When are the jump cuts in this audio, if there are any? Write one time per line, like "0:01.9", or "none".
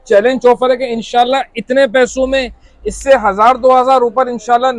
none